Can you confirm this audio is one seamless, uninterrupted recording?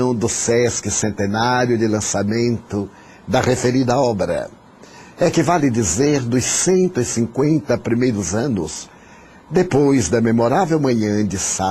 no; 1 cut; at 5.1 s

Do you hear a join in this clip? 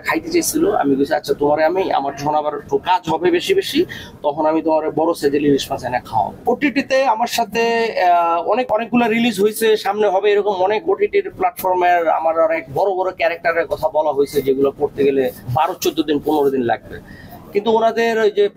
no; 0 cuts

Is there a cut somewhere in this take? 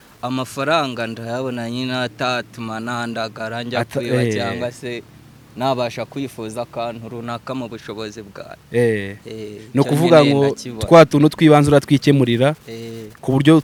no; 0 cuts

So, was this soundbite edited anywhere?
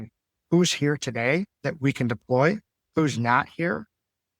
yes; 1 cut; at 1.6 s

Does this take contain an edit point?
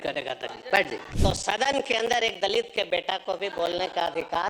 yes; 1 cut; at 1.0 s

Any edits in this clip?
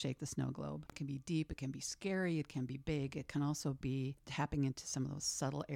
yes; 2 cuts; at 1.0 s, 4.2 s

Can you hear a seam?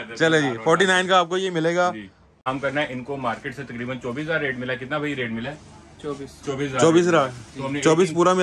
yes; 1 cut; at 2.4 s

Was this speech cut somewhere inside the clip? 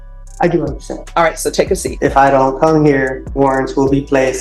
yes; 2 cuts; at 1.9 s, 3.2 s

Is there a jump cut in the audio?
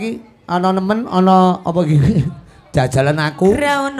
no; 0 cuts

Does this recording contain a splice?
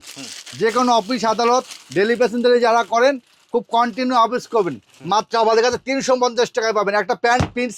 no; 0 cuts

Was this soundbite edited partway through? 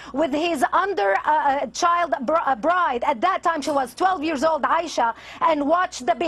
no; 0 cuts

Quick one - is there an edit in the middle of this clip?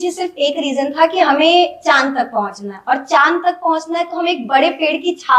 no; 0 cuts

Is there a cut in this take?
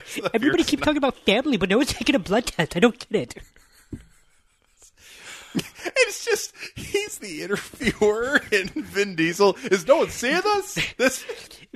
no; 0 cuts

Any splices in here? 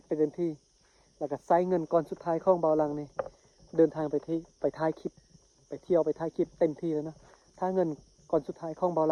no; 0 cuts

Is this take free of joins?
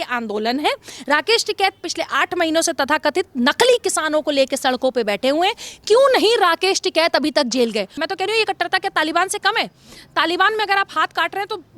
no; 1 cut; at 8.0 s

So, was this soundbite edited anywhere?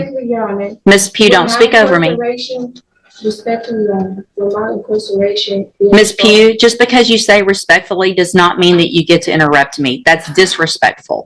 no; 0 cuts

